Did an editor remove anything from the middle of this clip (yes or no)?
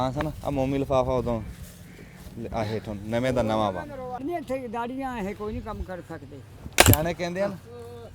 yes